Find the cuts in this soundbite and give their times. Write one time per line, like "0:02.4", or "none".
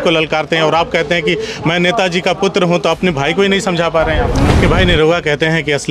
0:04.4